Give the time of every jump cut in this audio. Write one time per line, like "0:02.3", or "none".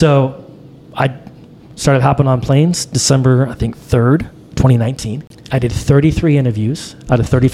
0:05.3